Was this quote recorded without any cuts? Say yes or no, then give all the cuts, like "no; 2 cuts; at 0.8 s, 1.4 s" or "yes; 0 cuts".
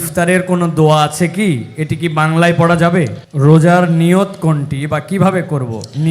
no; 1 cut; at 3.2 s